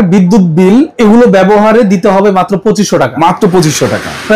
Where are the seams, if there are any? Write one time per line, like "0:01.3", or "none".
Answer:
0:00.9